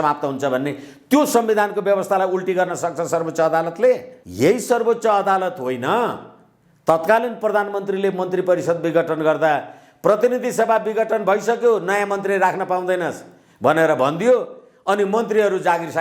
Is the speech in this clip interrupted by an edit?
yes; 1 cut; at 4.2 s

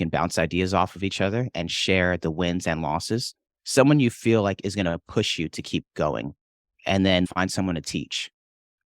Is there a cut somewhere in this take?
yes; 1 cut; at 7.3 s

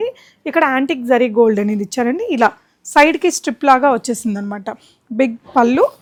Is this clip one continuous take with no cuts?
yes; 0 cuts

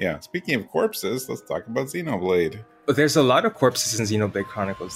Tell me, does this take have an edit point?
no; 0 cuts

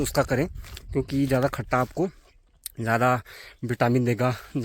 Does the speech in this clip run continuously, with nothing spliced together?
yes; 0 cuts

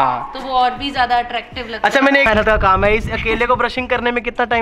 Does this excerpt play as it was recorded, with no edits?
no; 1 cut; at 2.3 s

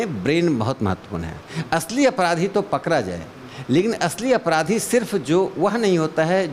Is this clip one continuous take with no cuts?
yes; 0 cuts

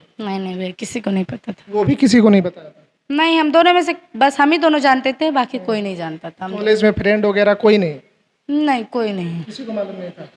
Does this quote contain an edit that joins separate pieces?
no; 0 cuts

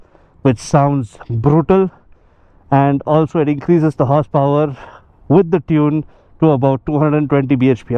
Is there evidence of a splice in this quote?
no; 0 cuts

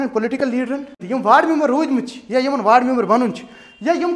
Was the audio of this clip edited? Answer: yes; 1 cut; at 1.0 s

